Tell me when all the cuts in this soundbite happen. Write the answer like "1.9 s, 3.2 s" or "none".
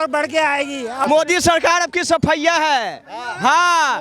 1.0 s